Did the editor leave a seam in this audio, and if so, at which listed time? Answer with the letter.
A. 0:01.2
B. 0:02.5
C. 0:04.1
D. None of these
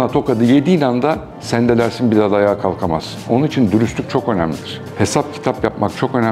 D